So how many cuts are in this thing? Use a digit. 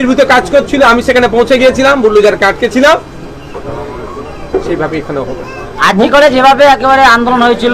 0